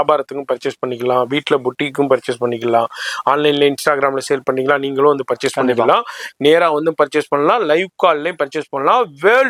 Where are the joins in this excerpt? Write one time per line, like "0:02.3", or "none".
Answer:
none